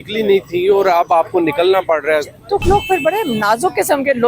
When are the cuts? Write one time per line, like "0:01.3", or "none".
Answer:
0:02.6